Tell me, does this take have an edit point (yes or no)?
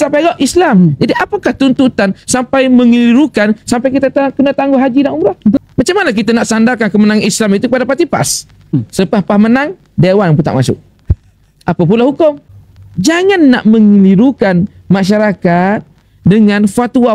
yes